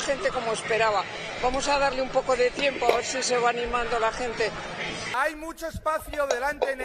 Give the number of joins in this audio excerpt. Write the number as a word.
zero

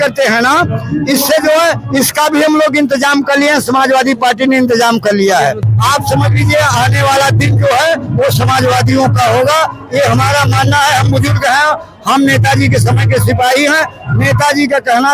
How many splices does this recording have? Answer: one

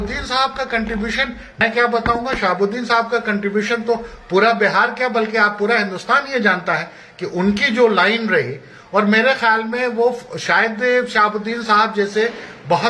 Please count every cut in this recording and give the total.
one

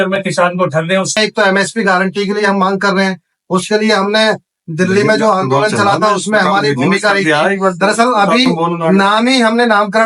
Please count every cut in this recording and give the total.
one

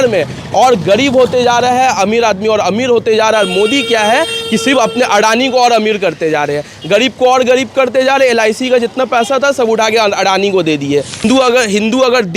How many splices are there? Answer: one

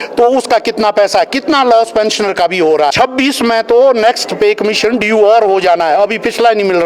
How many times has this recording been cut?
one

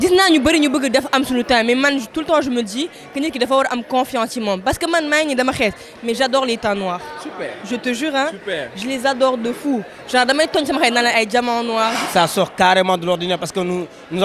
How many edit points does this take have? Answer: one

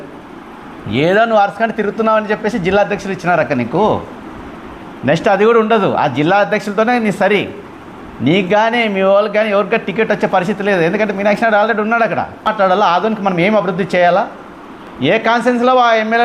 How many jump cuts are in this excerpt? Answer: one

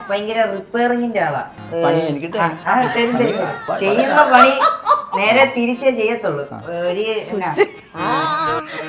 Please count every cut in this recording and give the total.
two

